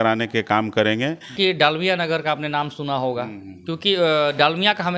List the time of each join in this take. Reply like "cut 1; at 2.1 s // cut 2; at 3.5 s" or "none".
cut 1; at 1.3 s